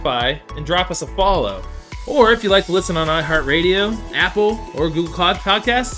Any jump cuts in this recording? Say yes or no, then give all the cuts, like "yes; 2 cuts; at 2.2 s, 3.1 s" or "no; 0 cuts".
no; 0 cuts